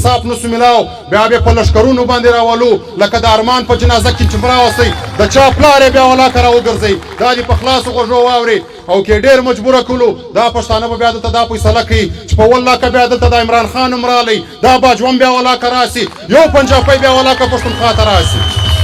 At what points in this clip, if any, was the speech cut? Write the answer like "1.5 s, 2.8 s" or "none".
none